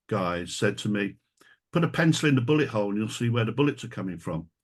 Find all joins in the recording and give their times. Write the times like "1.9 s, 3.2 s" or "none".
none